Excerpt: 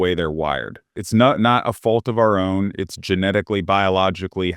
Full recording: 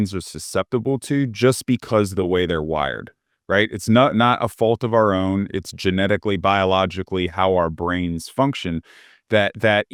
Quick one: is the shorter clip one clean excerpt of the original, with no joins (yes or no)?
no